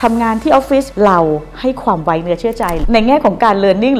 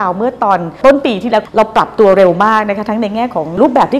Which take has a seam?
first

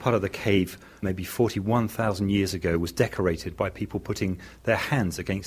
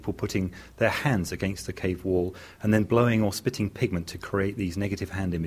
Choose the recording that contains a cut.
first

